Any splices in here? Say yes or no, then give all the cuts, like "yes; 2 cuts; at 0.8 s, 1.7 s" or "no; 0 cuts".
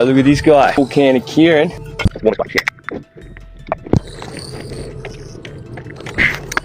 yes; 2 cuts; at 0.8 s, 1.9 s